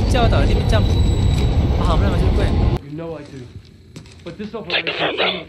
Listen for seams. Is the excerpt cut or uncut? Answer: cut